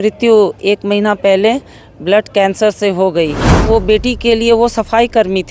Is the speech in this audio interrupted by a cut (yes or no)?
yes